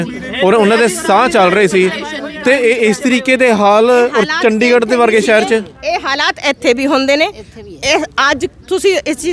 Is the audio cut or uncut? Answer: uncut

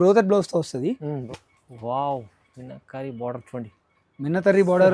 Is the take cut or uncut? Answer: cut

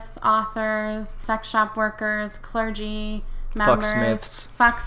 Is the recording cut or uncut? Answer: cut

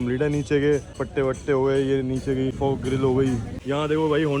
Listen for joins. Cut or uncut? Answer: cut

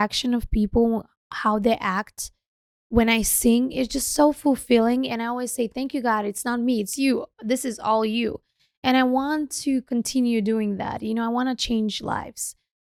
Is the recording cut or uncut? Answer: uncut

